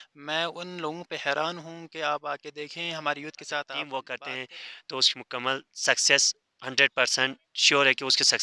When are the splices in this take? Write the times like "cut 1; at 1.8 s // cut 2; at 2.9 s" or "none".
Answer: cut 1; at 3.8 s

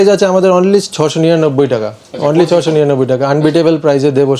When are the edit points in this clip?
none

